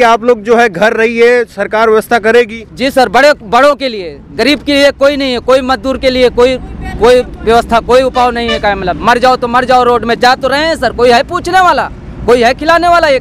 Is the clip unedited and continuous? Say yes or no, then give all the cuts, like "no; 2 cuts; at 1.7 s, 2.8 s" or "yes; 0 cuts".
yes; 0 cuts